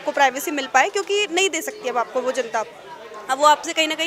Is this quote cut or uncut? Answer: uncut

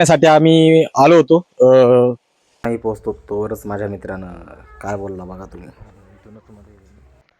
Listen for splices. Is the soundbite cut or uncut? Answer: cut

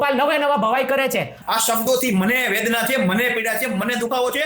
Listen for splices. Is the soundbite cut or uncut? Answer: cut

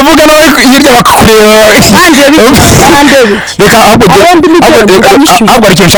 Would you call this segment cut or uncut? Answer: uncut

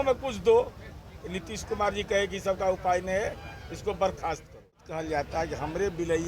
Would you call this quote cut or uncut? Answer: cut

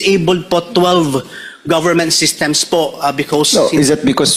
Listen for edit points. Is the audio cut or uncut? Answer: uncut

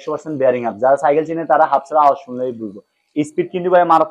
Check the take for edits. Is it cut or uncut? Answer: uncut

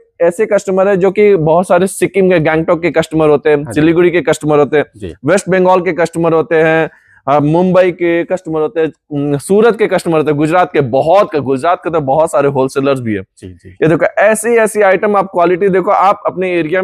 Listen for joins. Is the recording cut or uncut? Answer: uncut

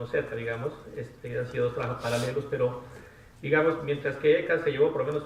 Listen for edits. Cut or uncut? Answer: uncut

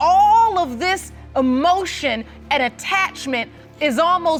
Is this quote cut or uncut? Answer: uncut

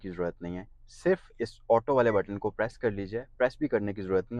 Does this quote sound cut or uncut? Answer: uncut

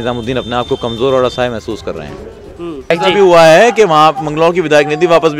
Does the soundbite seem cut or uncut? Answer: cut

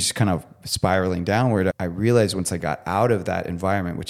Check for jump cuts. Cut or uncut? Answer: cut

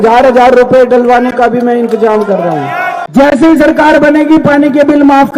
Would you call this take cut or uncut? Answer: cut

